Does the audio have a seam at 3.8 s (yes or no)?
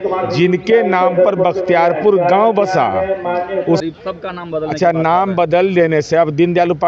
yes